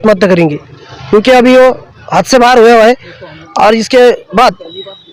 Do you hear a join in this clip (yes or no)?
no